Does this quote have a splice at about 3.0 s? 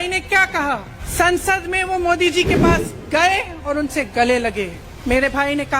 no; 2 cuts; at 1.0 s, 4.9 s

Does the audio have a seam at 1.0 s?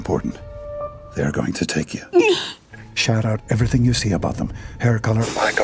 yes; 1 cut; at 1.0 s

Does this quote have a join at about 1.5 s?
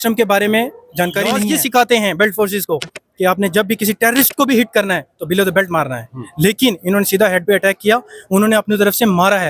yes; 1 cut; at 1.5 s

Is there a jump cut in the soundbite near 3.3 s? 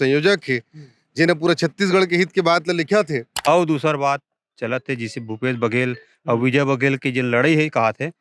yes; 1 cut; at 3.3 s

